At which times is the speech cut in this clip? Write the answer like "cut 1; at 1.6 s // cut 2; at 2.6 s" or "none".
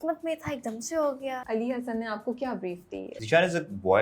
cut 1; at 1.4 s // cut 2; at 3.1 s